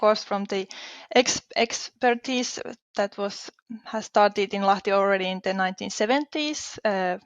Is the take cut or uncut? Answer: uncut